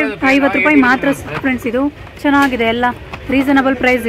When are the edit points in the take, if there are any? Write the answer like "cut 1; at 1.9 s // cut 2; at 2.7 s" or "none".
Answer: none